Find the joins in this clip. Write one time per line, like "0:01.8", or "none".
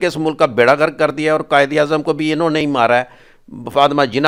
none